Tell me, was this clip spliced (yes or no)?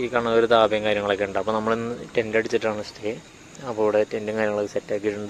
no